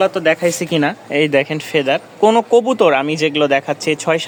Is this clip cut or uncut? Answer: uncut